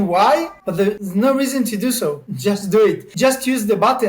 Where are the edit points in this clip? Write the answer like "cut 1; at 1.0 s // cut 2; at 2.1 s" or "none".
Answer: cut 1; at 0.9 s // cut 2; at 2.3 s // cut 3; at 3.1 s